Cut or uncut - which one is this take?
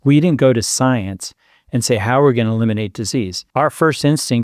cut